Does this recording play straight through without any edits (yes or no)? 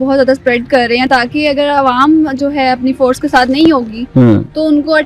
yes